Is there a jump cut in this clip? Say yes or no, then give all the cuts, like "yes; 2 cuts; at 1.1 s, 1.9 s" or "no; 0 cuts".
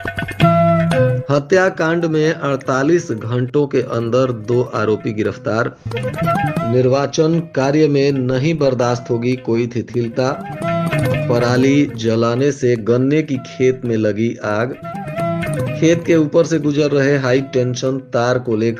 yes; 1 cut; at 1.2 s